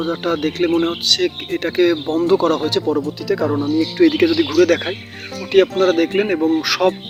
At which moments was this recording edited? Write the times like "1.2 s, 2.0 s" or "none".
none